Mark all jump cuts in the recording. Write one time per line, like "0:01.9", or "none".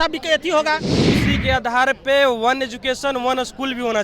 0:00.9